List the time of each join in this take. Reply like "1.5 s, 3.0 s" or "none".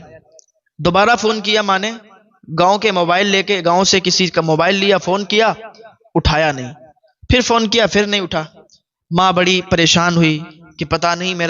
none